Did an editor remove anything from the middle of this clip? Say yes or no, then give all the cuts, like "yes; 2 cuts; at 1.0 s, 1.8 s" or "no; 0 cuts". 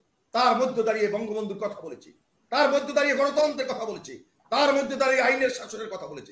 no; 0 cuts